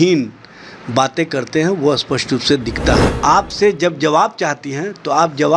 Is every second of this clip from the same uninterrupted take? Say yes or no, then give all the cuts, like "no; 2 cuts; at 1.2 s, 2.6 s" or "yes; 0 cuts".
no; 1 cut; at 3.1 s